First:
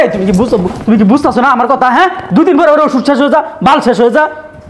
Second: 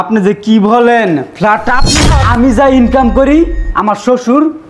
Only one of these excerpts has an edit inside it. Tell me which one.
second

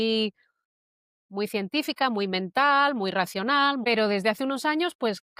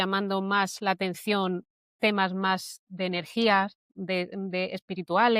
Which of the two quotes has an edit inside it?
first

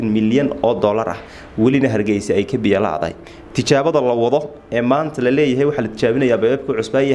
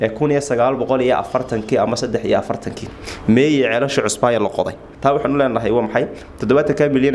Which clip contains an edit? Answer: second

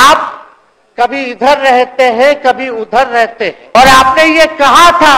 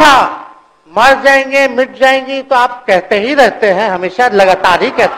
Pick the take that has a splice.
first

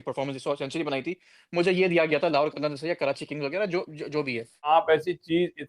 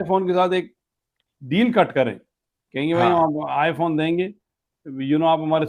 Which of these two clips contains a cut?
first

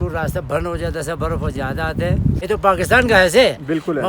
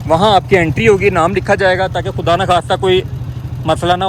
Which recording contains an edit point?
first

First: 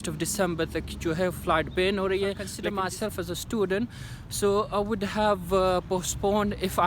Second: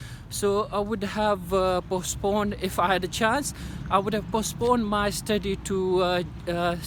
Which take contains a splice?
first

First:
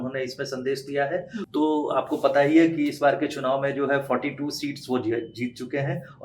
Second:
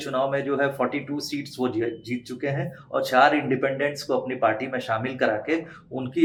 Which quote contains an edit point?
first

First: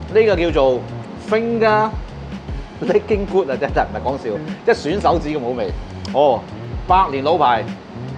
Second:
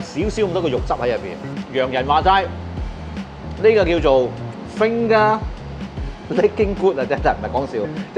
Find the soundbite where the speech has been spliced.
second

